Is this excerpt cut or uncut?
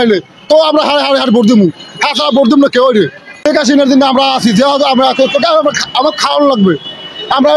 cut